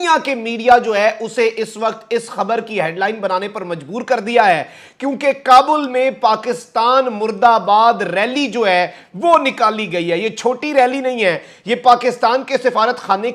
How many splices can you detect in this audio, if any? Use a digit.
0